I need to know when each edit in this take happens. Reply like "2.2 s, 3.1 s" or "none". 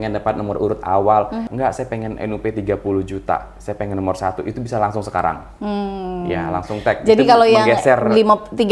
1.5 s